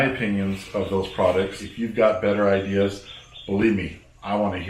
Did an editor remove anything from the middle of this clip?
yes; 1 cut; at 1.6 s

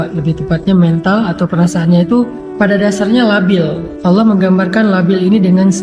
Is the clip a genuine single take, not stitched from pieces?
no; 2 cuts; at 2.4 s, 3.8 s

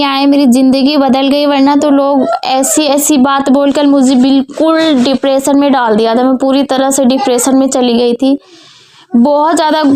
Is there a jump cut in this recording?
no; 0 cuts

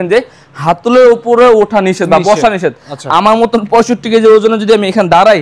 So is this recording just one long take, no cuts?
yes; 0 cuts

